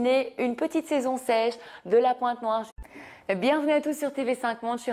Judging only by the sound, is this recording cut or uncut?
uncut